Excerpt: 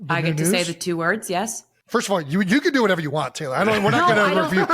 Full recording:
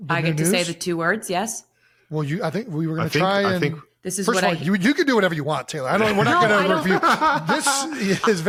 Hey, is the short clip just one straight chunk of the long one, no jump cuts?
no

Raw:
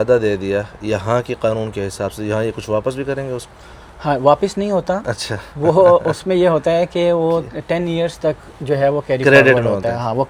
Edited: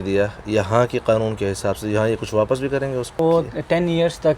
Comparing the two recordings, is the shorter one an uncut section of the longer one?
no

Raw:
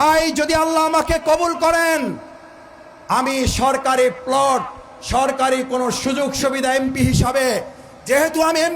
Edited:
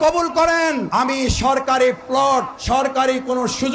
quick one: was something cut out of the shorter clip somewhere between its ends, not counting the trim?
yes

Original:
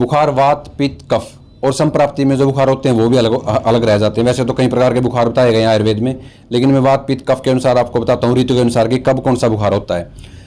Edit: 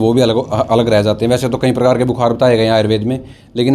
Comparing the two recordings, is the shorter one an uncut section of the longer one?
yes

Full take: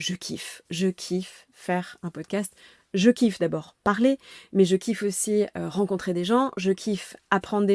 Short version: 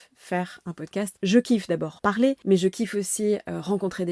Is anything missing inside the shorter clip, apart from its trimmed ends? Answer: yes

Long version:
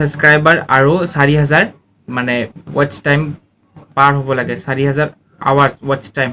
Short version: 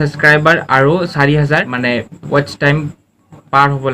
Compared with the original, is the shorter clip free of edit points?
no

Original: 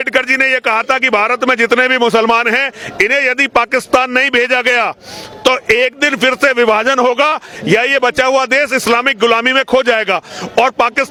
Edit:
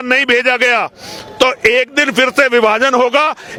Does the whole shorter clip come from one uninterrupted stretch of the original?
yes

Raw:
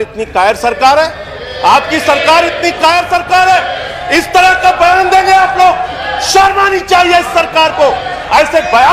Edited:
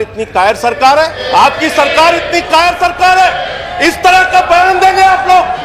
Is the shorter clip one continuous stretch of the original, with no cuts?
no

